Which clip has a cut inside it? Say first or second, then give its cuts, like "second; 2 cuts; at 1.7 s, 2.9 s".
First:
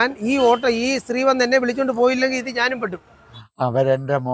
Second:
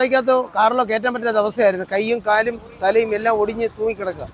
first; 1 cut; at 3.4 s